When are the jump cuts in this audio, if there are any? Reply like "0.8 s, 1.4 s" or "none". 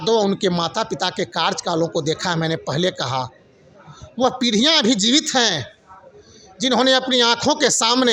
none

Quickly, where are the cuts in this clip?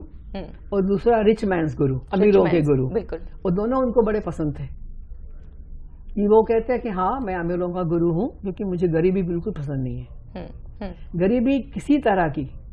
none

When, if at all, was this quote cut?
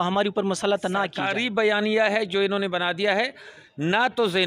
1.2 s

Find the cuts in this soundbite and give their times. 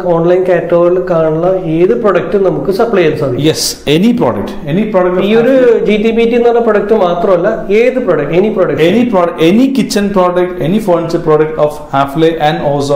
none

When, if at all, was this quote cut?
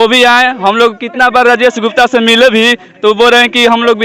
none

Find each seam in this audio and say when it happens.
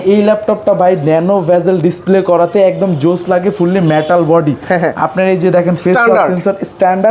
none

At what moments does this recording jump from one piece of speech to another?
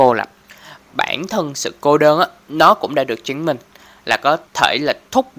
4.5 s

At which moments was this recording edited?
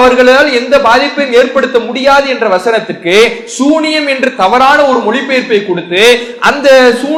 none

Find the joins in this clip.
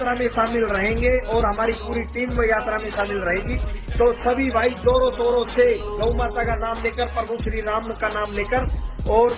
none

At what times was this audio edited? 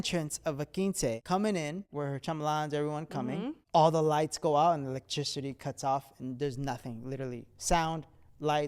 1.2 s, 1.9 s, 3.6 s

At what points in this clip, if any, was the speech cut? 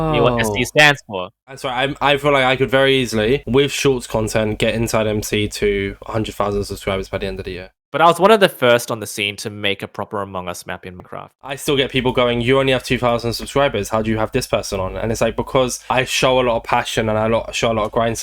1.5 s, 7.7 s, 11.4 s

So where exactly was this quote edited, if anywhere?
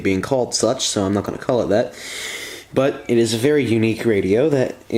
none

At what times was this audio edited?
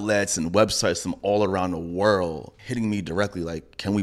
2.5 s

